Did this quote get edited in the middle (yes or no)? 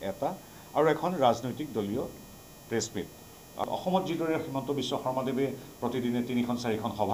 yes